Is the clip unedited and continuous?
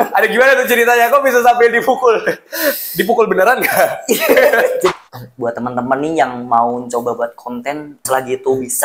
no; 2 cuts; at 4.9 s, 8.0 s

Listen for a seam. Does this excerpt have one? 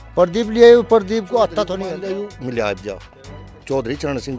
yes; 1 cut; at 1.7 s

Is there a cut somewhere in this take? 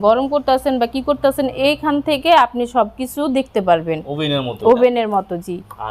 no; 0 cuts

